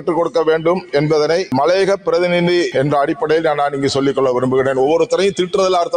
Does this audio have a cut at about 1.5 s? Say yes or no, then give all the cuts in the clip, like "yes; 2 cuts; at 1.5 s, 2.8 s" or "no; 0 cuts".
yes; 2 cuts; at 1.5 s, 2.7 s